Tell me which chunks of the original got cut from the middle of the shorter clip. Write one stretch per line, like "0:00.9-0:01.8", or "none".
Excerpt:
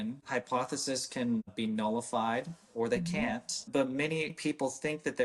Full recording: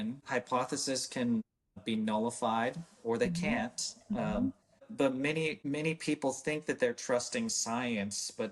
0:01.5-0:01.8
0:03.8-0:04.8
0:05.6-0:06.0